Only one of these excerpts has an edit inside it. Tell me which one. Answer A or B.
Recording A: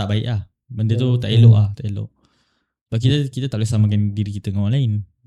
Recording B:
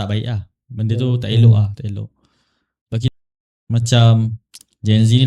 B